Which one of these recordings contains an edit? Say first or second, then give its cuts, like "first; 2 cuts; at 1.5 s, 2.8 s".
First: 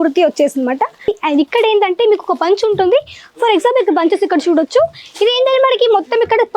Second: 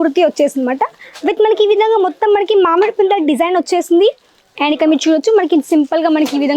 first; 1 cut; at 1.2 s